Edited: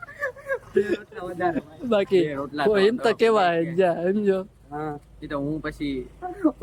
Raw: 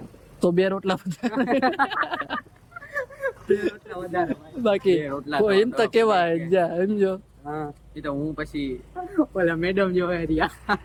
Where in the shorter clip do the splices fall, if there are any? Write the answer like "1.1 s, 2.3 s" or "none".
none